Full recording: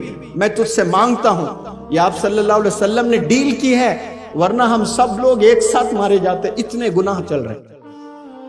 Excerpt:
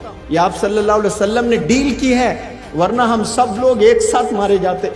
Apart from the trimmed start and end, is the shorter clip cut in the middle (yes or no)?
no